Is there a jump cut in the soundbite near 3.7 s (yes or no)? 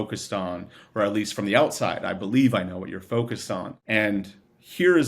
yes